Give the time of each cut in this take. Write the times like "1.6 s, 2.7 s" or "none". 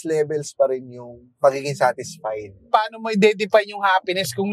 2.7 s